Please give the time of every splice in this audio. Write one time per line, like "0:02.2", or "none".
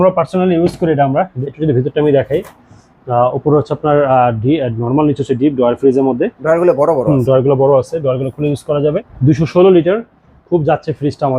0:01.4
0:09.1